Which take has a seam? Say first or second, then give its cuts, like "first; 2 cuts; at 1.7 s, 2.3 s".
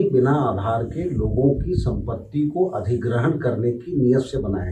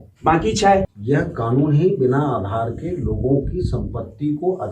second; 1 cut; at 0.9 s